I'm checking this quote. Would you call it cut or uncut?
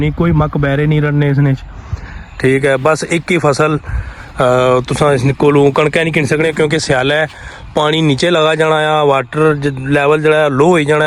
uncut